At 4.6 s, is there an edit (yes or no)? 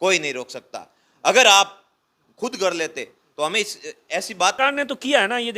yes